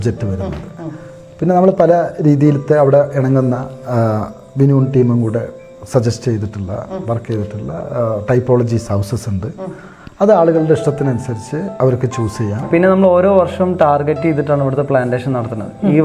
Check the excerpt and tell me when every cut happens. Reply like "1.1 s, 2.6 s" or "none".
12.6 s